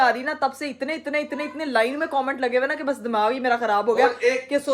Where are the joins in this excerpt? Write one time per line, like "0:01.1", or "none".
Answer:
none